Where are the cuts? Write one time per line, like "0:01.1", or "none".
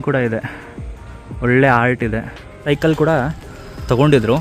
0:02.7